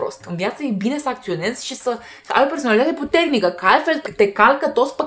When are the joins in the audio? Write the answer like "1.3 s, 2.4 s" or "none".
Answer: 4.0 s